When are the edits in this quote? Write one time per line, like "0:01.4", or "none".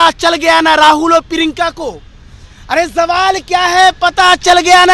none